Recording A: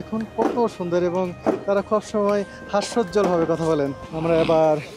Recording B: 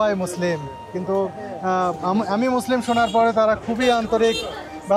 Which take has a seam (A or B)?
A